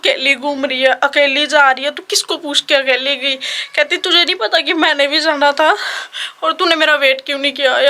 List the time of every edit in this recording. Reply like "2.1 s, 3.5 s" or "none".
none